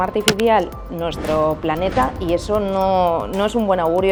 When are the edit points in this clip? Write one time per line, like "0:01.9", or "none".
none